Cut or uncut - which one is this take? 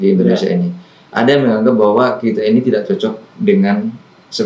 uncut